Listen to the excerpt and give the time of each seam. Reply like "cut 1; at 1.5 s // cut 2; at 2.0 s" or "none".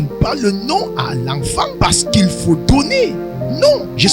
cut 1; at 1.7 s